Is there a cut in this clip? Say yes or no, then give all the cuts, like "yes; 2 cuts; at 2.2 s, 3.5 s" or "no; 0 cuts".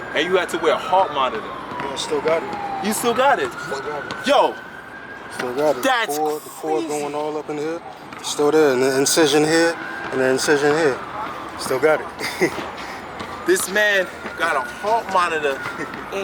no; 0 cuts